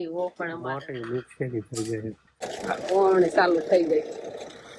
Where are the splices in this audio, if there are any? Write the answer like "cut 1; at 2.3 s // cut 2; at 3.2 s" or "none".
cut 1; at 2.3 s